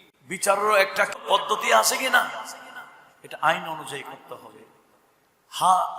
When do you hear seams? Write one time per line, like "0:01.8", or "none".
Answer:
0:01.2